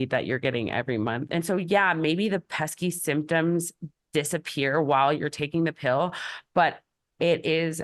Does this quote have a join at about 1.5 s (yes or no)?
no